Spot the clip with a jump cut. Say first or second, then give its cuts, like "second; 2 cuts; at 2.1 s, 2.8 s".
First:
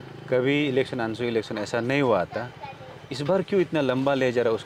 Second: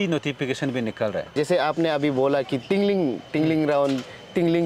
second; 1 cut; at 1.3 s